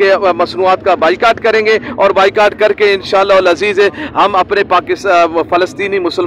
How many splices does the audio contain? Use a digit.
0